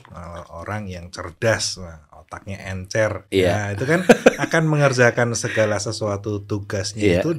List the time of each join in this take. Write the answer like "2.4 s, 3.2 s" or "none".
none